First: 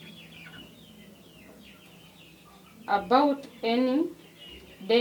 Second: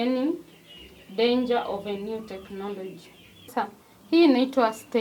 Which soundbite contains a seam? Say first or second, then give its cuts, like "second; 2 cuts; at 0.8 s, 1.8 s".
second; 1 cut; at 3.5 s